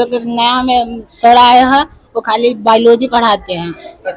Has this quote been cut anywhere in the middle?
no; 0 cuts

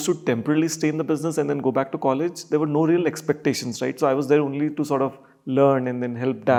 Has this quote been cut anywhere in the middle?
no; 0 cuts

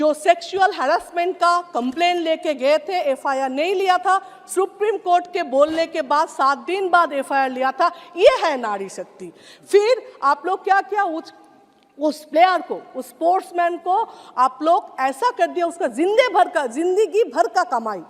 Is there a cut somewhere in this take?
no; 0 cuts

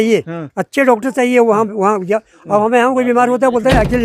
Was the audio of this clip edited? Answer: no; 0 cuts

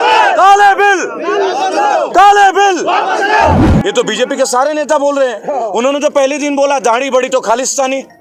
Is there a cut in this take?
yes; 1 cut; at 3.7 s

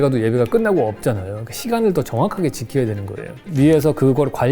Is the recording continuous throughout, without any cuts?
no; 1 cut; at 3.3 s

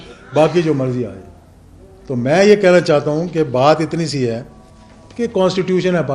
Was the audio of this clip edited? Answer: no; 0 cuts

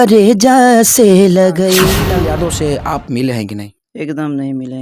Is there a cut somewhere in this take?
yes; 1 cut; at 2.0 s

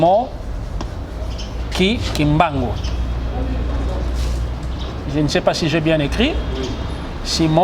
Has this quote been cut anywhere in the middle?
no; 0 cuts

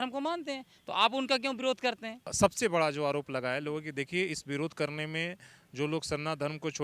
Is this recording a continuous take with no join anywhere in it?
no; 1 cut; at 2.3 s

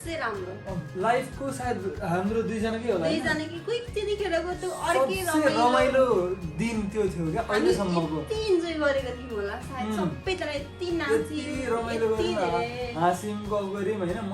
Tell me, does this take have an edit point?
no; 0 cuts

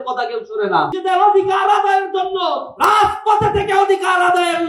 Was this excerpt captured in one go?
no; 1 cut; at 0.9 s

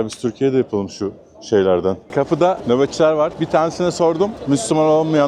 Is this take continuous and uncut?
no; 3 cuts; at 2.1 s, 3.4 s, 4.4 s

